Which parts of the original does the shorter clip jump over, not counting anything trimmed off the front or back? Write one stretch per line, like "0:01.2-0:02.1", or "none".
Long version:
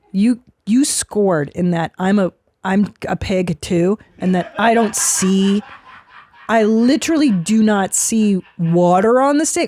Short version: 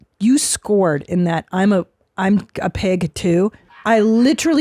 0:04.1-0:06.3